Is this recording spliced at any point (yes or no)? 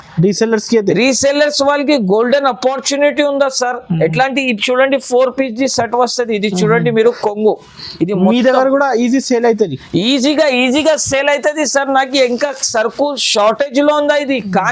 no